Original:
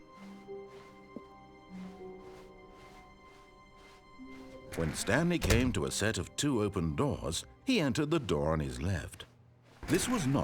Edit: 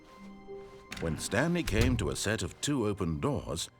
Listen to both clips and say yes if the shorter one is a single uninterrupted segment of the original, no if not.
no